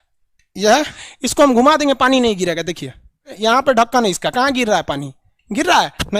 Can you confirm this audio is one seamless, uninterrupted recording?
no; 2 cuts; at 1.0 s, 3.3 s

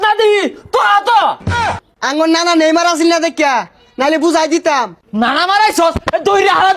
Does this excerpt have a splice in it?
yes; 2 cuts; at 1.5 s, 5.0 s

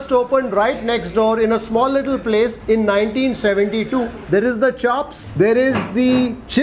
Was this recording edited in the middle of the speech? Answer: yes; 1 cut; at 4.2 s

